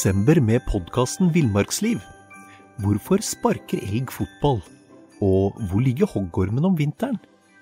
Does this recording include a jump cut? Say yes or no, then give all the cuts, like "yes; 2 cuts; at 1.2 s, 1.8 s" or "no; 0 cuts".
no; 0 cuts